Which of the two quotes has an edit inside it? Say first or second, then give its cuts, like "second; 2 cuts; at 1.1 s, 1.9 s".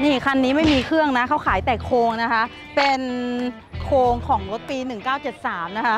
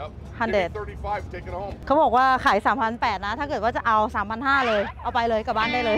second; 1 cut; at 1.7 s